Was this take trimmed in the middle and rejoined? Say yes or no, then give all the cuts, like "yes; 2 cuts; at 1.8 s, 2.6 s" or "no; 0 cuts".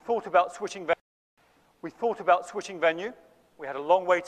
no; 0 cuts